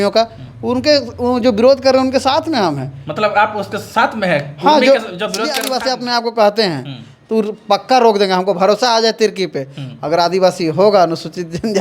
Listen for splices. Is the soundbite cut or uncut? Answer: cut